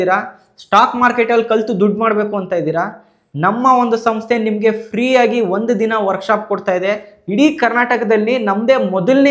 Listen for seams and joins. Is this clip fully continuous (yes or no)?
no